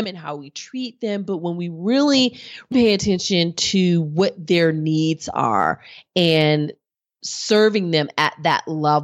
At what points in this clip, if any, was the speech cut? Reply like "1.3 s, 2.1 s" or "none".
2.7 s